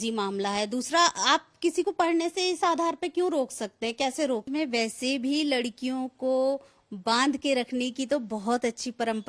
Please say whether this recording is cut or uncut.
cut